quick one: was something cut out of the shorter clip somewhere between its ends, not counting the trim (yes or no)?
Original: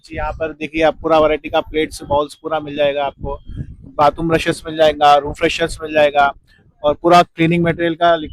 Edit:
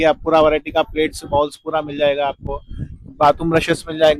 no